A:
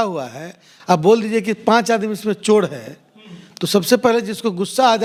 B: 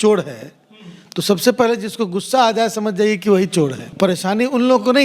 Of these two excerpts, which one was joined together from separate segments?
B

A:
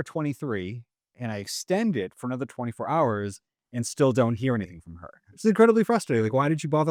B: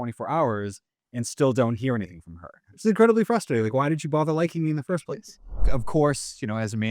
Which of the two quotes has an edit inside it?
B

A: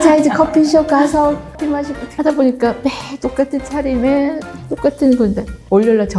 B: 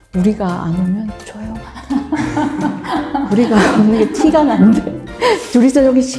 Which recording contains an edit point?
A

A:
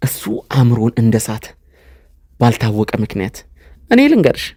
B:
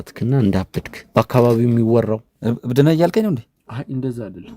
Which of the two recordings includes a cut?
B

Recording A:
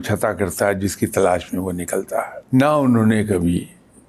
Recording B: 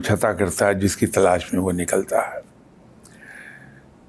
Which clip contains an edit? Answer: A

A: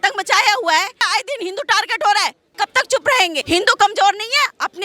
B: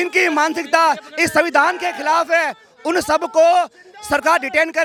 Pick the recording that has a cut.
A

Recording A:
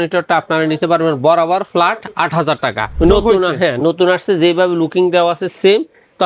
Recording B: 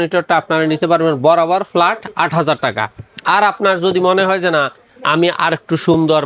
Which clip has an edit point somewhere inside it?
A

